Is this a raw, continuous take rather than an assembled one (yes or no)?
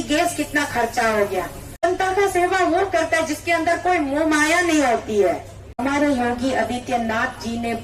no